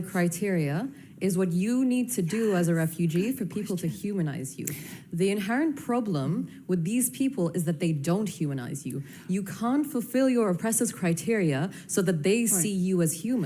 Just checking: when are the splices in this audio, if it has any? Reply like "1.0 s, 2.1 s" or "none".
8.0 s